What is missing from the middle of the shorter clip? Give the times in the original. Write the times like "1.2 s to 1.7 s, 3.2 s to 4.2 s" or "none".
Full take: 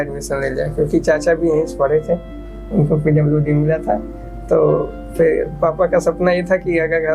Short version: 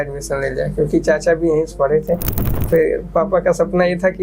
2.5 s to 5.0 s